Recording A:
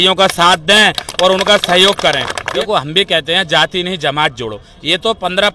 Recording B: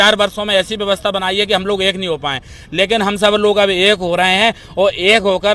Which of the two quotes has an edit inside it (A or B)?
A